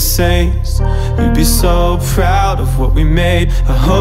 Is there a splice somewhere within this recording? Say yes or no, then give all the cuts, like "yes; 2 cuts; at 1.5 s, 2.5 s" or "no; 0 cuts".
no; 0 cuts